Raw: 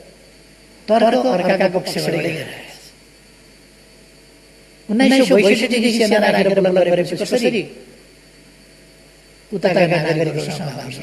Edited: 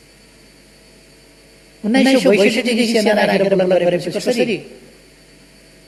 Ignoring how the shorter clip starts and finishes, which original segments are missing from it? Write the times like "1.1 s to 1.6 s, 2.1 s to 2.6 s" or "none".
none